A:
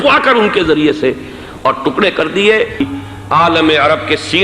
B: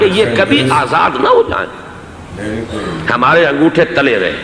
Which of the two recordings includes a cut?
A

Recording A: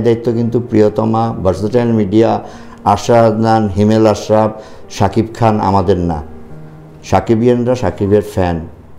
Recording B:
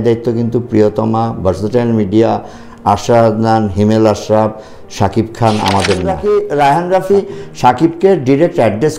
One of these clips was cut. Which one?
B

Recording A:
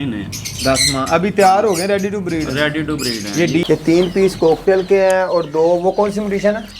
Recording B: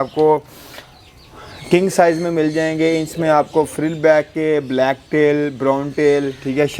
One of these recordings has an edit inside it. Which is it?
A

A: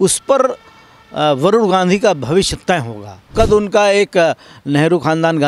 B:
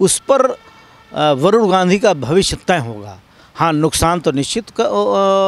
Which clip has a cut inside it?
A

